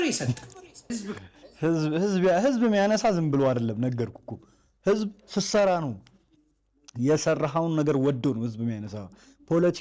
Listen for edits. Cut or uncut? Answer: cut